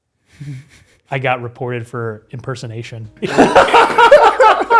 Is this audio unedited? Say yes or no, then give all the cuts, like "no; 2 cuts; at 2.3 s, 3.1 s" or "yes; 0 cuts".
no; 1 cut; at 3.2 s